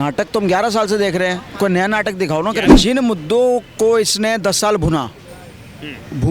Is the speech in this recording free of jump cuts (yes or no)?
no